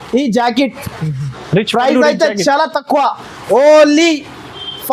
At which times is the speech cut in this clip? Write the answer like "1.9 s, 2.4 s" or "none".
none